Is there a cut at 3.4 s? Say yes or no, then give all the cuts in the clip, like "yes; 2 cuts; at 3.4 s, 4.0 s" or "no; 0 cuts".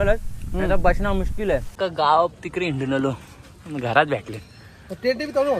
no; 1 cut; at 1.7 s